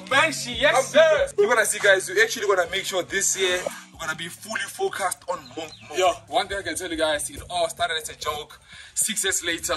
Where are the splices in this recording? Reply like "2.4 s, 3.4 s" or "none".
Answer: none